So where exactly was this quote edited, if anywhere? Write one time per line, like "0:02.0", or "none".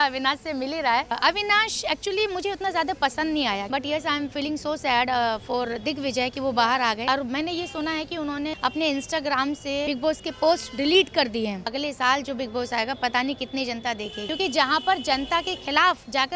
0:01.2
0:03.6
0:07.0
0:08.6
0:09.9
0:11.7
0:14.2